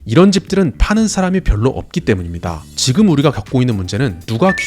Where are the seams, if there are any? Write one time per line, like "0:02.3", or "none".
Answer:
0:02.7